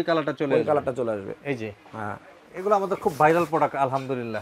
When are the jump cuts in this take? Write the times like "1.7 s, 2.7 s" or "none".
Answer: 2.3 s